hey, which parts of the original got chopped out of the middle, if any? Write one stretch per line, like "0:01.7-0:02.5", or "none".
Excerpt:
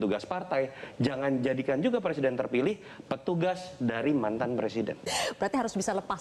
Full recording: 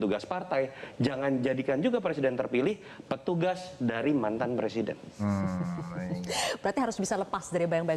0:05.0-0:06.3